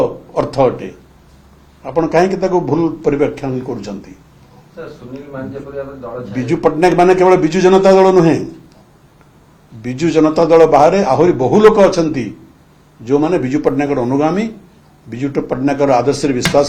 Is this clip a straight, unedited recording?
yes; 0 cuts

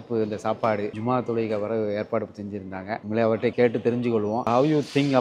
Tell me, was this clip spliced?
no; 0 cuts

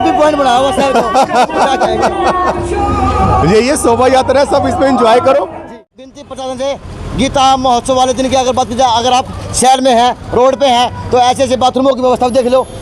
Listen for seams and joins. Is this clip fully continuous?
no; 1 cut; at 5.6 s

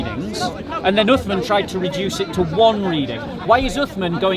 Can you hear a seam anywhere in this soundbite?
no; 0 cuts

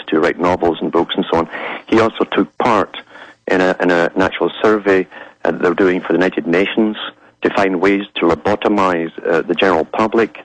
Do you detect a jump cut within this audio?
no; 0 cuts

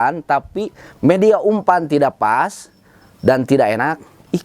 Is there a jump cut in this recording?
no; 0 cuts

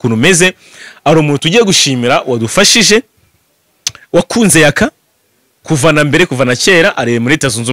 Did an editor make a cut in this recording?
no; 0 cuts

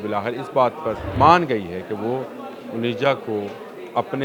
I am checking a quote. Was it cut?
yes; 1 cut; at 1.1 s

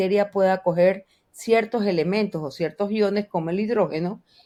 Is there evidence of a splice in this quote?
no; 0 cuts

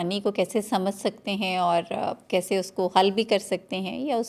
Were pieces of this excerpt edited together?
no; 0 cuts

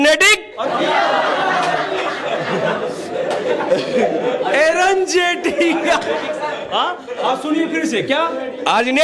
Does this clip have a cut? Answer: no; 0 cuts

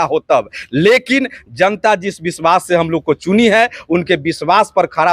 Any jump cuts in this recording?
no; 0 cuts

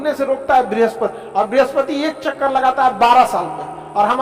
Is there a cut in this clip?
yes; 1 cut; at 1.2 s

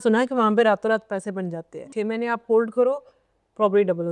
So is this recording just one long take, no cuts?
no; 1 cut; at 1.9 s

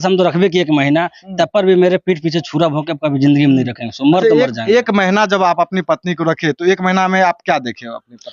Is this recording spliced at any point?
no; 0 cuts

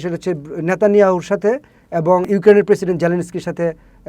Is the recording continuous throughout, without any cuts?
no; 1 cut; at 2.2 s

